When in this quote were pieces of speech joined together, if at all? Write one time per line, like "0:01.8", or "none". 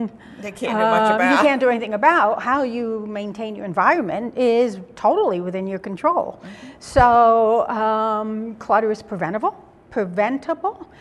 0:05.2